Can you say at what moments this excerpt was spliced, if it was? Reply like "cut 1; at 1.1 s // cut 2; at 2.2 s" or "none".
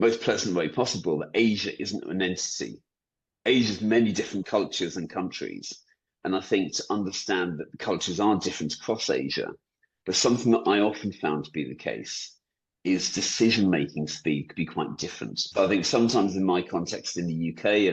cut 1; at 4.4 s // cut 2; at 7.7 s // cut 3; at 15.4 s